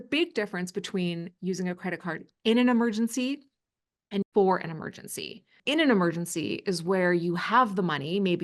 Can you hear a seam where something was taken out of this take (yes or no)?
yes